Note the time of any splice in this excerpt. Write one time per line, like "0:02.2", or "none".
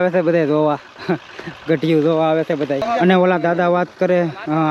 0:02.8